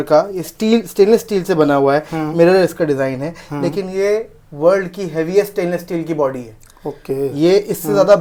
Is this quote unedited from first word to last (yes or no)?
yes